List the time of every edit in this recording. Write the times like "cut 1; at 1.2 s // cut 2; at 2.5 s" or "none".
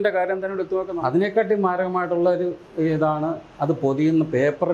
cut 1; at 0.9 s